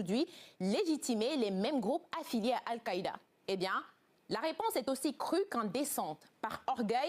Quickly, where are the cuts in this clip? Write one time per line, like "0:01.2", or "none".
0:03.3